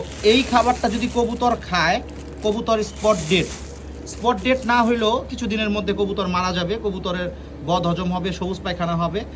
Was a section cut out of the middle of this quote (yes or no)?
no